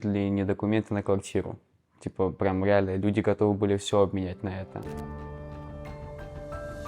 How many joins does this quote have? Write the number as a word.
zero